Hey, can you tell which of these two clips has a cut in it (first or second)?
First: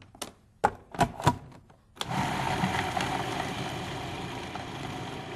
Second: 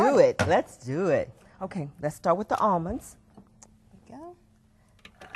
second